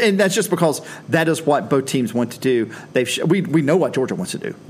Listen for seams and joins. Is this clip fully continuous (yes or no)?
yes